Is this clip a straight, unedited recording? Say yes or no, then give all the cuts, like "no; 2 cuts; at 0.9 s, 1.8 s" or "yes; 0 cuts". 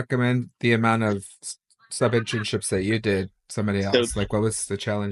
yes; 0 cuts